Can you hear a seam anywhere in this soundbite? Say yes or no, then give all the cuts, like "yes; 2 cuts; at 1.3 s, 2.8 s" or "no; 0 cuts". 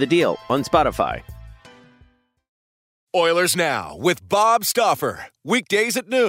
yes; 1 cut; at 2.9 s